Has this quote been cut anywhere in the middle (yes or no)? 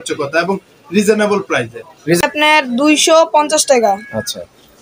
yes